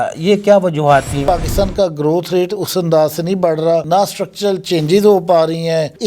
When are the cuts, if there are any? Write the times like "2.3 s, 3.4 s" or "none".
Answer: 1.2 s

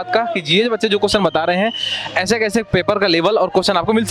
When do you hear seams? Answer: none

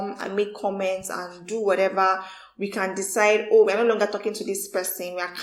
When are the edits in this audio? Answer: none

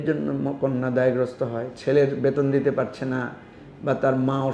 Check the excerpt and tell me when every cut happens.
none

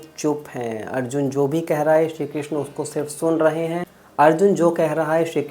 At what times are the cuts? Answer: 4.0 s

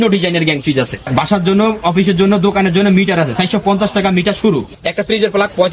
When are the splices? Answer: 1.0 s, 4.8 s

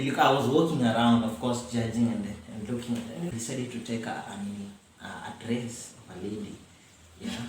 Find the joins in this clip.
3.3 s

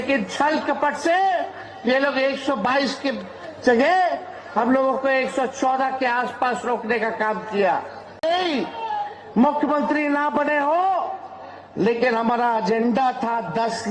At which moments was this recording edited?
8.2 s

